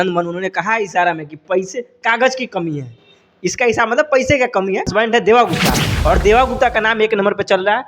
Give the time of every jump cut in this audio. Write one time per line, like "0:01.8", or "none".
0:04.9